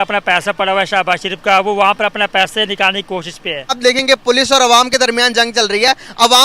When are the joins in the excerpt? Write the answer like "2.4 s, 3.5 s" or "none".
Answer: 3.8 s